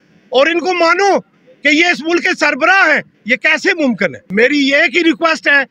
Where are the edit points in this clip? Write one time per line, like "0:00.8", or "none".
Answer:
0:04.2